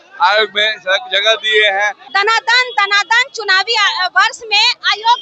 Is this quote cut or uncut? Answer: cut